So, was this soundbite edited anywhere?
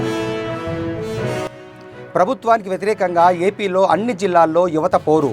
no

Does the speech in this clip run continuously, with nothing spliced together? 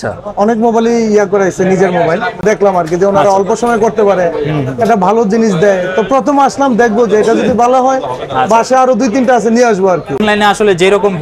no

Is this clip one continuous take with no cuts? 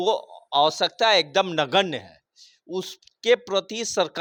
yes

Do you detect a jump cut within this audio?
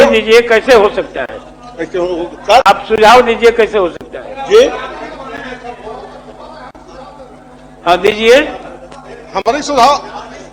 no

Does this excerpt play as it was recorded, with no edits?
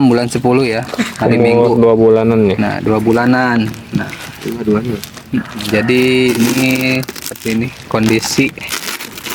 yes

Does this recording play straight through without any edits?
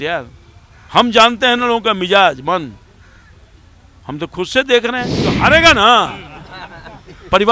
no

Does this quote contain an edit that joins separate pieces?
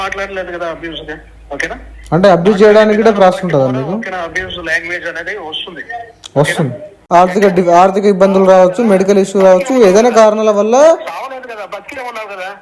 yes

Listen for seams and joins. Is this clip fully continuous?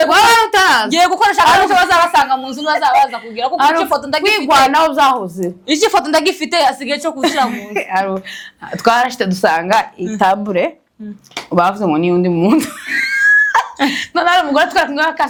yes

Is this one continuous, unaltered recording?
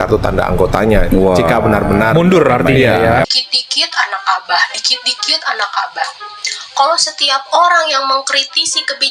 no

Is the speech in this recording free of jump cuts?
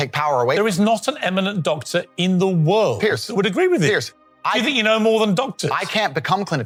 yes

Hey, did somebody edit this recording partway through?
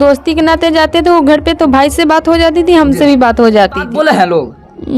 yes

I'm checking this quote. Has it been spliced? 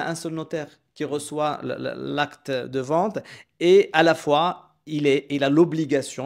no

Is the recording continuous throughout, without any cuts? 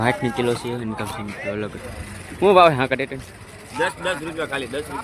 no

